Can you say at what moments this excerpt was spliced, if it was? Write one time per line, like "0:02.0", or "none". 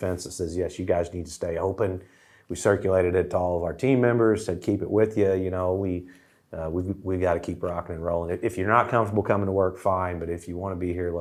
none